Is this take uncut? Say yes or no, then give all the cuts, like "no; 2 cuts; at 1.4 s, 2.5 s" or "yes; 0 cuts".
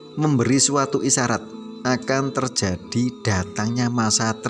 yes; 0 cuts